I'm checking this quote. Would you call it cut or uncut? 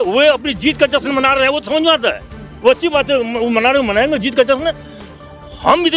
uncut